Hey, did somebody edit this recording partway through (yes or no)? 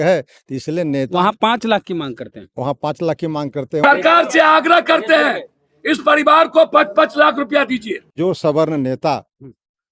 yes